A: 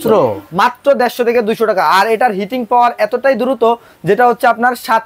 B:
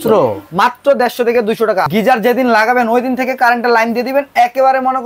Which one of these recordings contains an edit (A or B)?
B